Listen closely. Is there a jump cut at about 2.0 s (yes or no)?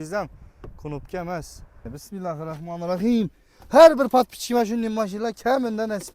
yes